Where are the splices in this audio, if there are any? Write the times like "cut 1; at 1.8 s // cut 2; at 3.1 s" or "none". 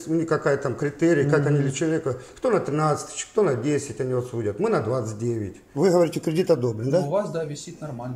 cut 1; at 5.7 s